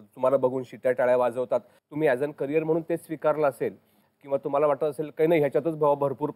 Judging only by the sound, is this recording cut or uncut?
cut